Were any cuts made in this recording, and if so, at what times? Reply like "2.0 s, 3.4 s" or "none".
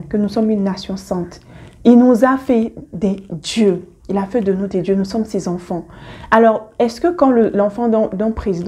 none